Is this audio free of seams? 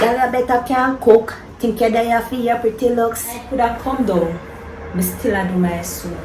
no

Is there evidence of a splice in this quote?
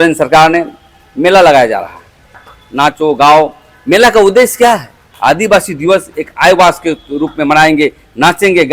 yes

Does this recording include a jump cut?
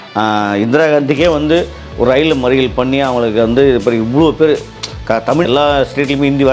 yes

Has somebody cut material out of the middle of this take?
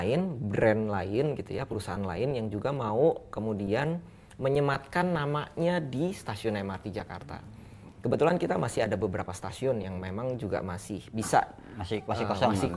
no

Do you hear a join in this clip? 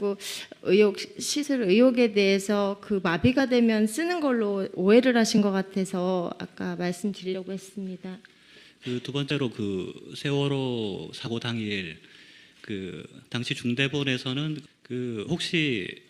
no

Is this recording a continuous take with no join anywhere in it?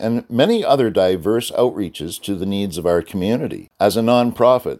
no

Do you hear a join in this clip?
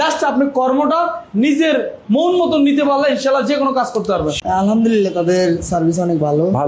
yes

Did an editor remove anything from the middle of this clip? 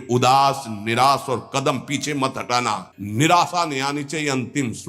yes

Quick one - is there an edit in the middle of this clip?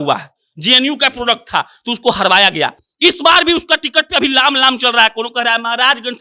no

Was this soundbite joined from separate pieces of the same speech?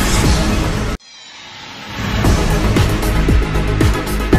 no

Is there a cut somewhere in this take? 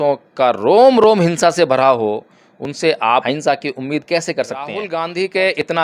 yes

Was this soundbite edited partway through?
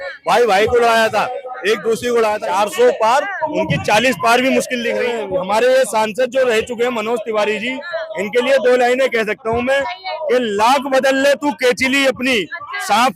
yes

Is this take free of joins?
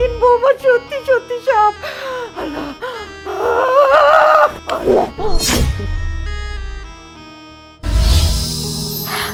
yes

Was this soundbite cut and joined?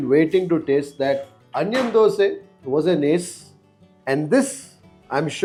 no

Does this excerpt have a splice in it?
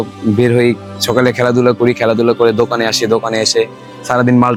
no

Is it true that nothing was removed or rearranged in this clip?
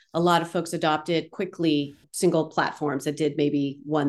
no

